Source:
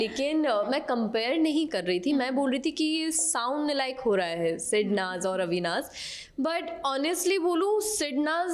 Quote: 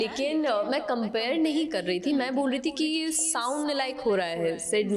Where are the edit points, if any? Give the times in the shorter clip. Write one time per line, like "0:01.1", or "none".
none